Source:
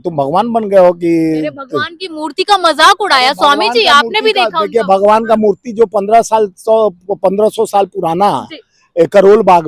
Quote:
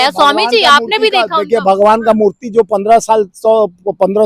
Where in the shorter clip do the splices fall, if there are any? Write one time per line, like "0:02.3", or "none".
none